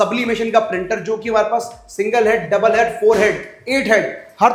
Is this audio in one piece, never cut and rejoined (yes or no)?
yes